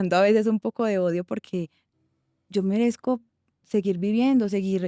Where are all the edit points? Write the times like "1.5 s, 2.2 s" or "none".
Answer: 1.8 s